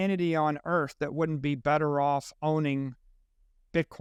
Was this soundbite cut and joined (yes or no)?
no